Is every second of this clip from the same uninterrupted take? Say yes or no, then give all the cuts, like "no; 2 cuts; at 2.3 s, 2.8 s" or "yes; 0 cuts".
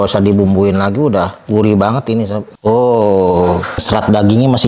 no; 3 cuts; at 1.4 s, 2.5 s, 3.8 s